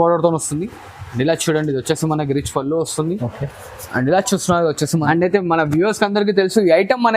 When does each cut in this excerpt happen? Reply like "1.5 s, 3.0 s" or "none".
5.0 s